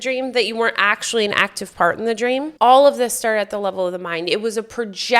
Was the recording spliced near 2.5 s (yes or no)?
yes